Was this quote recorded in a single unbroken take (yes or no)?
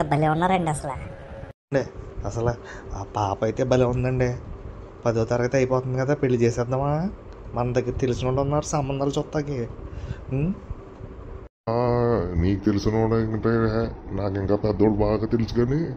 yes